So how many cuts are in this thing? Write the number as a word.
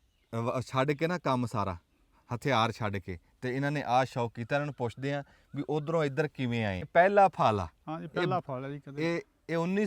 one